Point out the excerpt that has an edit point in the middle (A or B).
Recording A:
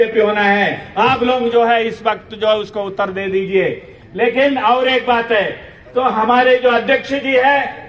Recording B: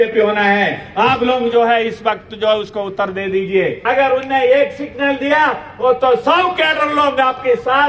B